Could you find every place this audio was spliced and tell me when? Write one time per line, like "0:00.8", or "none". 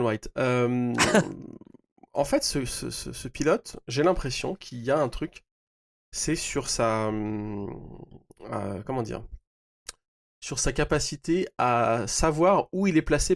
none